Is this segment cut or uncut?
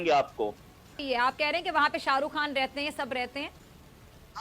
cut